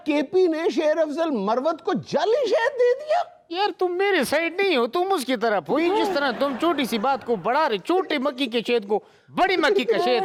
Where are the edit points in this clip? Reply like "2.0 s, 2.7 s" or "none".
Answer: none